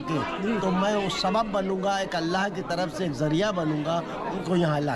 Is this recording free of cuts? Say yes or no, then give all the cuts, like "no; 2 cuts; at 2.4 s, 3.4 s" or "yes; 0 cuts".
yes; 0 cuts